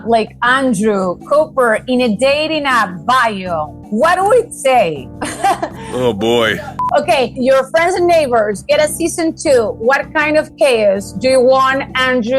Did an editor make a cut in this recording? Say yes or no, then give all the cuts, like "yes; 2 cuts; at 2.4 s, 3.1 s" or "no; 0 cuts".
yes; 1 cut; at 6.5 s